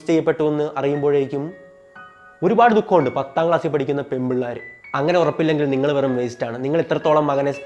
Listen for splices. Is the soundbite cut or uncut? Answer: cut